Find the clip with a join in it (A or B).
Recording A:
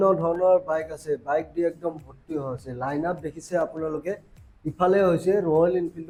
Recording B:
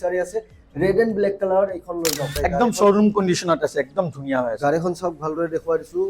B